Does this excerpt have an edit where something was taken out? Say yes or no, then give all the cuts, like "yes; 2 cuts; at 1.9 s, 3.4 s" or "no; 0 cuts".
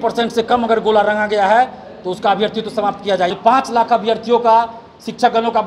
yes; 1 cut; at 3.3 s